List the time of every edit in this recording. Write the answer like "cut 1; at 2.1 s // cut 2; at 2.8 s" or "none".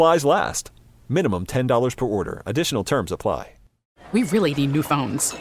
cut 1; at 3.8 s